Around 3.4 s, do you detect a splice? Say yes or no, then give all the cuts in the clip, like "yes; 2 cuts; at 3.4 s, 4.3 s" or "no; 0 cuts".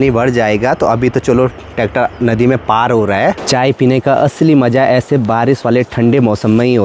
yes; 1 cut; at 3.4 s